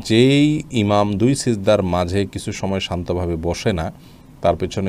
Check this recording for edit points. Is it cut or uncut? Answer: uncut